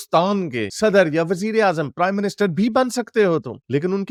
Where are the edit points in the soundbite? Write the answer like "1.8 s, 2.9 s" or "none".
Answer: none